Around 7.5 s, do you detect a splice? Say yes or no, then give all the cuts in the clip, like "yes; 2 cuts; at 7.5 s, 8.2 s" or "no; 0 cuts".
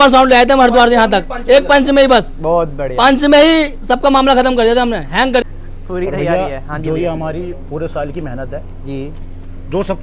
no; 1 cut; at 5.4 s